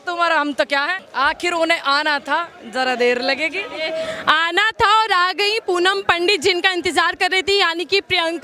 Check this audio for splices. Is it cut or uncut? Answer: uncut